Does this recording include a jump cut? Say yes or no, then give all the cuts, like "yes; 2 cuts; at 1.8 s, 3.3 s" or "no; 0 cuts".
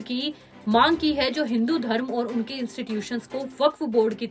no; 0 cuts